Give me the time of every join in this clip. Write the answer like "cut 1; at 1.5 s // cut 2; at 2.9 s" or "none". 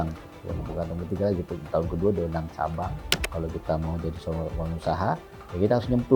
cut 1; at 3.3 s